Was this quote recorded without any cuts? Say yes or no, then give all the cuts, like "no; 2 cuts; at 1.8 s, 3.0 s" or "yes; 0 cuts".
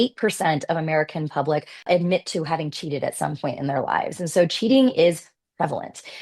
no; 1 cut; at 1.8 s